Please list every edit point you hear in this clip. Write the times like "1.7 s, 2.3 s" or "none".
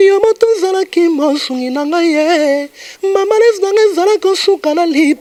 none